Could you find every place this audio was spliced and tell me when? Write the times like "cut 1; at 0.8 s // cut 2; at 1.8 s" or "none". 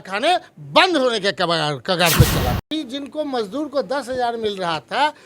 cut 1; at 2.7 s